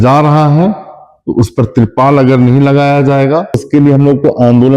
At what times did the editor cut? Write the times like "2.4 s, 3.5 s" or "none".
3.6 s